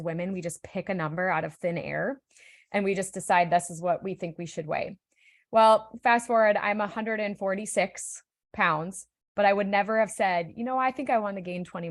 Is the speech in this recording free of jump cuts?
yes; 0 cuts

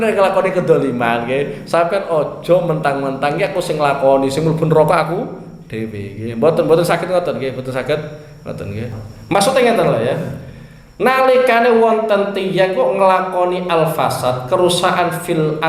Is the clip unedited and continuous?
no; 1 cut; at 9.0 s

